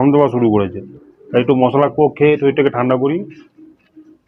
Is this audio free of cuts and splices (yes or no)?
yes